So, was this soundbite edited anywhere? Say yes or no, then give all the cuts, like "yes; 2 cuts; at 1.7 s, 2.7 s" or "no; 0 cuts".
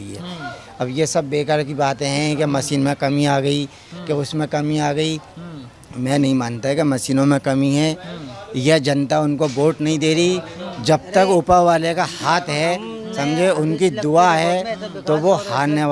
no; 0 cuts